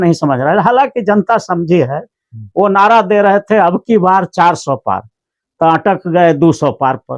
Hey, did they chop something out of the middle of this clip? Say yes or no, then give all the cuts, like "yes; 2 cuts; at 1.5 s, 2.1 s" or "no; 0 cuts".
no; 0 cuts